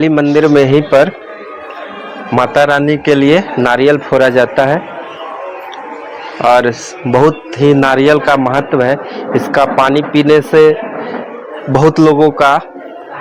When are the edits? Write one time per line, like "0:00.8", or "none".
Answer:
none